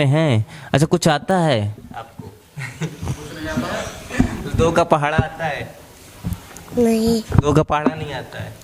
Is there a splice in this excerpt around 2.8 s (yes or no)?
no